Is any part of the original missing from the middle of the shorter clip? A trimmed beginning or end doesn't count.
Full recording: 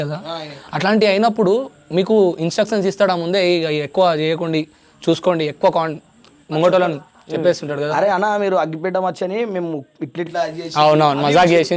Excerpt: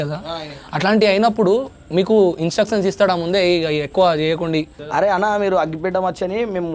yes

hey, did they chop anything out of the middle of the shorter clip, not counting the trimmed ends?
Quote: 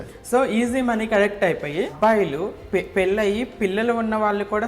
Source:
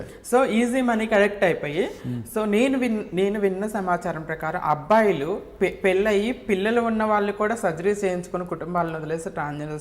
yes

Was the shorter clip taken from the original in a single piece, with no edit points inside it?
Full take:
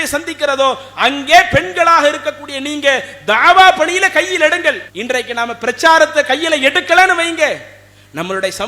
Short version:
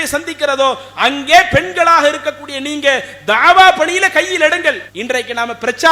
yes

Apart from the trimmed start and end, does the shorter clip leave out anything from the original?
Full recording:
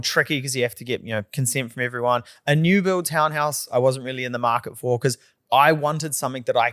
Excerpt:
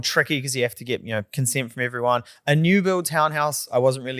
no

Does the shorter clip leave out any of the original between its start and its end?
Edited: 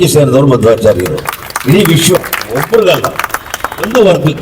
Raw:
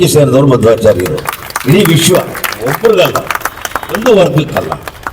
yes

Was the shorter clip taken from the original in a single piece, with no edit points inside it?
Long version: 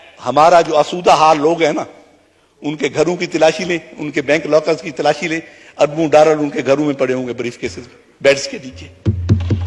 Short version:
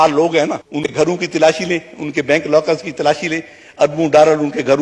no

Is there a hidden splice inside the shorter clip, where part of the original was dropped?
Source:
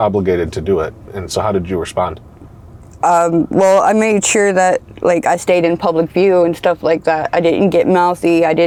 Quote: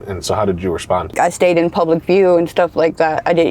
yes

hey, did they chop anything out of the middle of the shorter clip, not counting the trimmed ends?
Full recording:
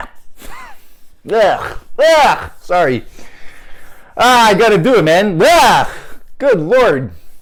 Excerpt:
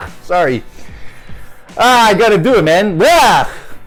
no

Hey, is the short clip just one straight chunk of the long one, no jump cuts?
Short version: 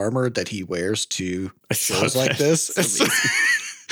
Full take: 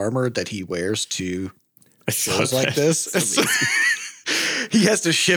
no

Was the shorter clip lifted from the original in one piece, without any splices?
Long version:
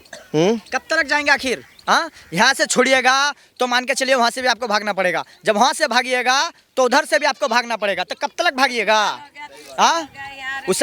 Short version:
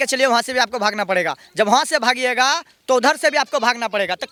yes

